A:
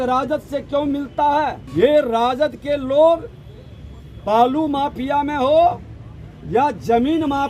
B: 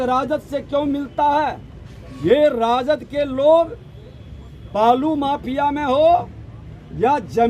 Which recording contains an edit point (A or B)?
A